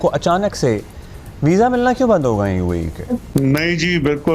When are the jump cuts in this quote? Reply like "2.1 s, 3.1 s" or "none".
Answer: 3.2 s